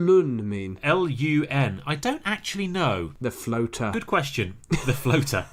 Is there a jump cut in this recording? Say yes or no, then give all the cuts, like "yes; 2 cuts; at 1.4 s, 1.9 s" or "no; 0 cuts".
no; 0 cuts